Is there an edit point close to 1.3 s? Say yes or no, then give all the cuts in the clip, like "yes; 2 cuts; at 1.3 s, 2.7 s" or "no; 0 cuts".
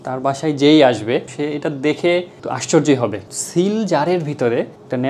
no; 1 cut; at 3.3 s